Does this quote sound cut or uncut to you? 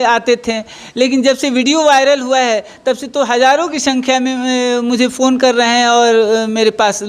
uncut